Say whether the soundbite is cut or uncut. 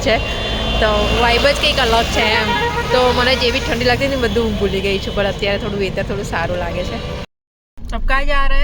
uncut